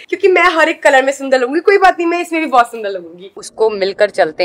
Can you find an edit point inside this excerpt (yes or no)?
yes